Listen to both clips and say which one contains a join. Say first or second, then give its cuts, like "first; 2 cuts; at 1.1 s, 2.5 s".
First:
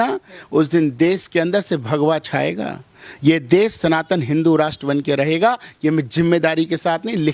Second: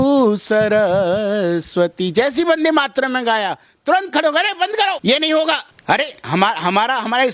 second; 2 cuts; at 5.0 s, 5.7 s